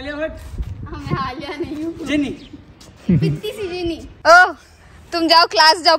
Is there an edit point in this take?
yes; 1 cut; at 4.1 s

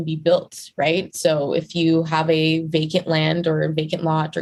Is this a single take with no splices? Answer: yes; 0 cuts

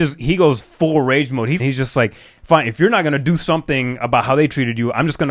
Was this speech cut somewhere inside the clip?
yes; 1 cut; at 1.6 s

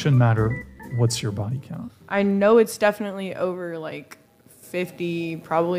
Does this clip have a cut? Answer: no; 0 cuts

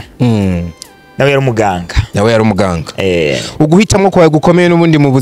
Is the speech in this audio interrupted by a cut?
no; 0 cuts

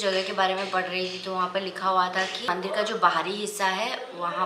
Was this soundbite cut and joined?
no; 0 cuts

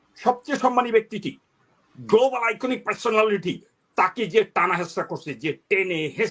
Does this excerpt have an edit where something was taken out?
no; 0 cuts

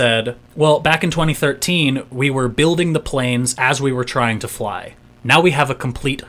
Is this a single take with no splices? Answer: yes; 0 cuts

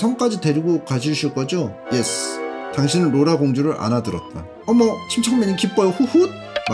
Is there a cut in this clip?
no; 0 cuts

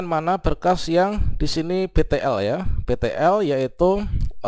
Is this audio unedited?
yes; 0 cuts

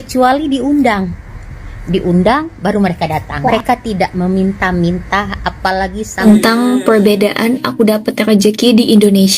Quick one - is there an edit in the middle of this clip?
yes; 2 cuts; at 3.5 s, 6.2 s

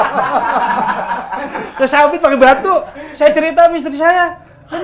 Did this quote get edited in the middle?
no; 0 cuts

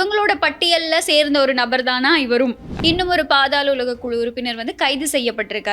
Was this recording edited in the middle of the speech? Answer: yes; 1 cut; at 2.7 s

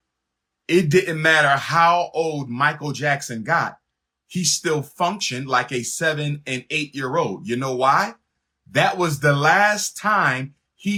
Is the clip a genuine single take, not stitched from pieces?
yes; 0 cuts

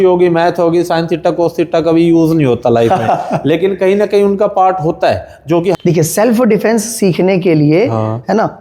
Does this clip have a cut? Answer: yes; 1 cut; at 5.8 s

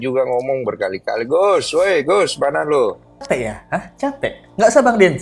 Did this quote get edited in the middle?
yes; 1 cut; at 3.2 s

